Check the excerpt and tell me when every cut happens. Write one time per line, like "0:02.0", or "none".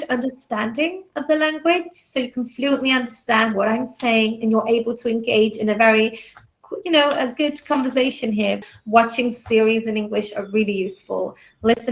0:08.7